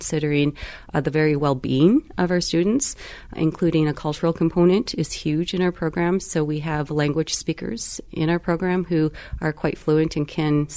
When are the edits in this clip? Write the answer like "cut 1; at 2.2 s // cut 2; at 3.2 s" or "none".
none